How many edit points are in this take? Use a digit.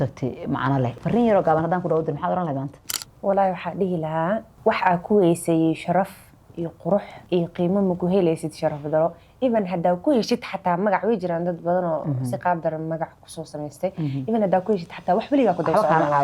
3